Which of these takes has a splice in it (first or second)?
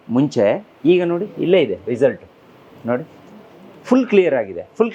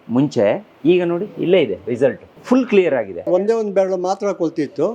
second